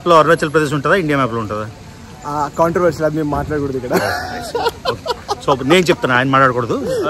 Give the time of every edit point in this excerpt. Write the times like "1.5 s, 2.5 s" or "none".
3.8 s